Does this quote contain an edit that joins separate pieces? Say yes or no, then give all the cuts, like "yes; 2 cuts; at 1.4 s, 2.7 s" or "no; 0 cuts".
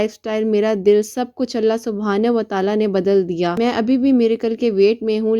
yes; 1 cut; at 3.5 s